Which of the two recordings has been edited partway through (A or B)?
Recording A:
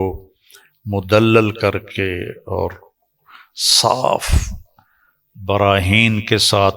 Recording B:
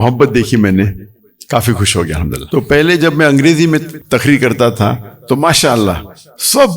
B